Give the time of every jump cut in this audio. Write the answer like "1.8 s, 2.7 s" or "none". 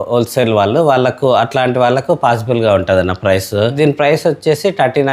3.7 s

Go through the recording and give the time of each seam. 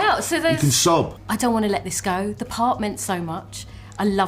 1.2 s

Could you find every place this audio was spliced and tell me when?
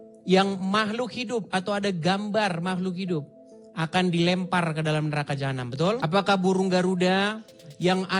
6.0 s

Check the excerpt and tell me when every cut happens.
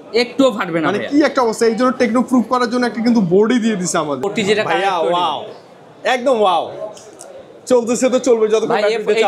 4.3 s

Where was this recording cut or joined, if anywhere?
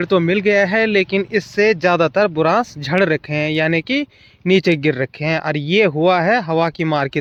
none

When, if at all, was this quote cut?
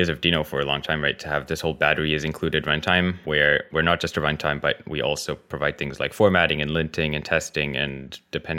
none

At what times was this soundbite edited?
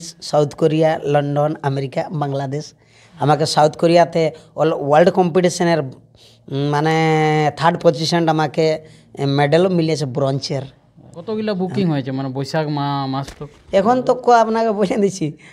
11.2 s

